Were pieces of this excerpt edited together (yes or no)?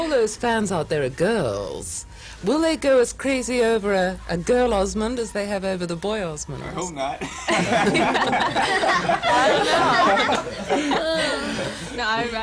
no